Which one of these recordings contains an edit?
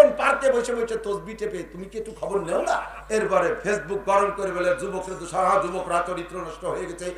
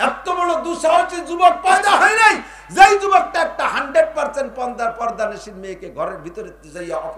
first; 1 cut; at 2.9 s

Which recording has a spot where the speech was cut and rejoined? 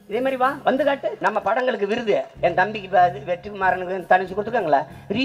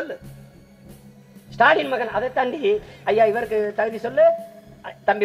first; 1 cut; at 1.1 s

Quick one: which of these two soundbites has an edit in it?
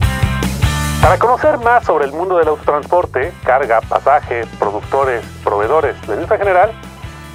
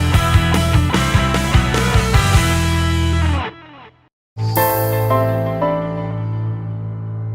second; 1 cut; at 4.2 s

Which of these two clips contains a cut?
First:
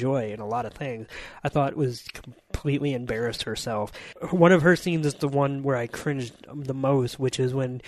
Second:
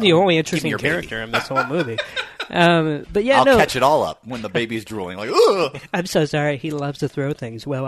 first; 1 cut; at 4.1 s

